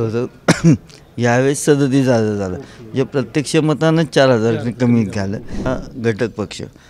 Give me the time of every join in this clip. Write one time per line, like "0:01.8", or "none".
0:05.7